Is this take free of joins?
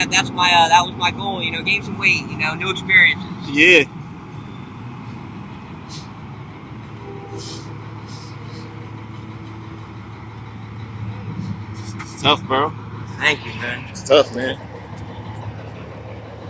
yes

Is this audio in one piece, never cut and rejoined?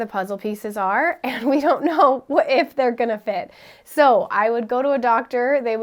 yes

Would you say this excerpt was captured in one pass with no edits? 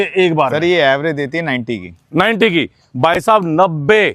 yes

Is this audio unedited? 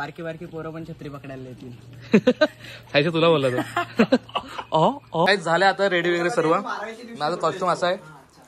no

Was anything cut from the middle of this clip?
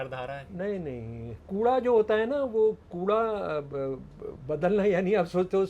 yes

